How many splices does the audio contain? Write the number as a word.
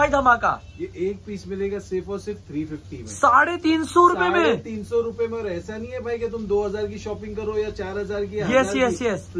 zero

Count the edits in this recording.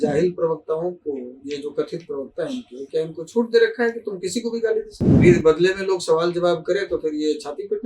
one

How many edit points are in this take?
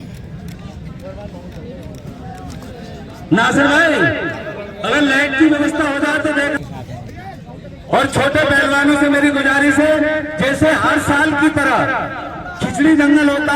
one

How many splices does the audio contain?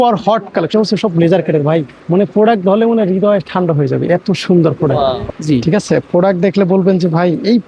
two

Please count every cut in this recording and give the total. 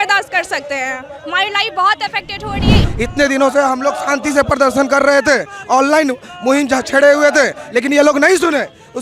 one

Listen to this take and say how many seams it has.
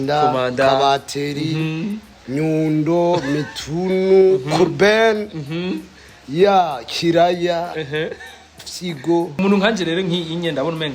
one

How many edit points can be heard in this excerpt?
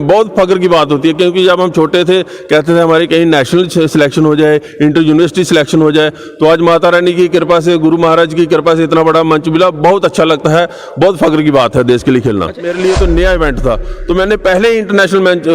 one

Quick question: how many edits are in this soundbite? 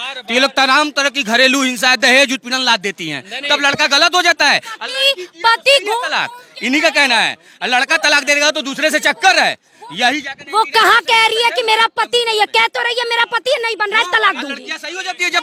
zero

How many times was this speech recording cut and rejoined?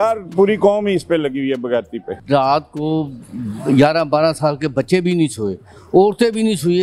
one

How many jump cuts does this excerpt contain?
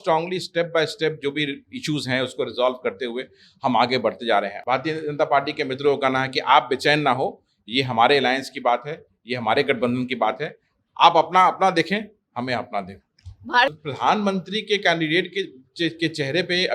two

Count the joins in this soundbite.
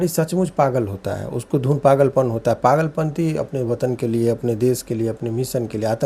zero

